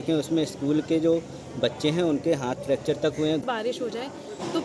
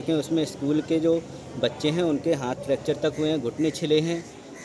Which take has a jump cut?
first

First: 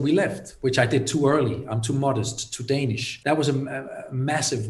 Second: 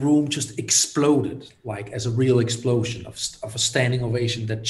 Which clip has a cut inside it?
first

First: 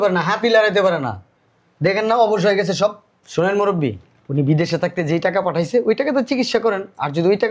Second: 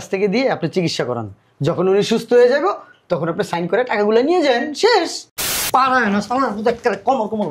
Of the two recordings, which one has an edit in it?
second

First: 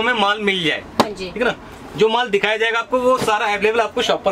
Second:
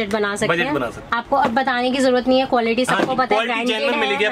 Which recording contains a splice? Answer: second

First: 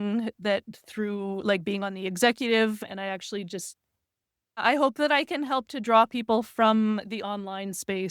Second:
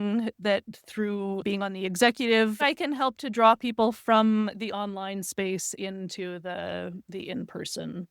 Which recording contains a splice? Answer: second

